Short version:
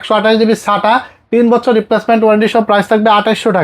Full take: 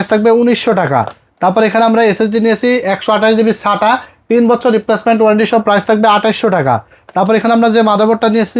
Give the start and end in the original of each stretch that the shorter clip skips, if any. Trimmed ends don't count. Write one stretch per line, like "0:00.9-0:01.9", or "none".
none